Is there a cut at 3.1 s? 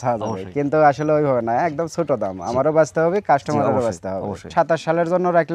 no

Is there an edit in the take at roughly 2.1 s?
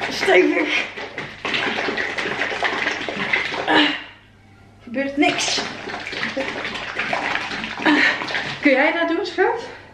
no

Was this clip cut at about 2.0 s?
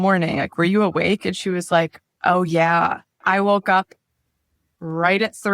yes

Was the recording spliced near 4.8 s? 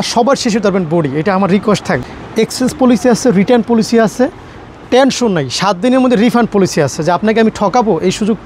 no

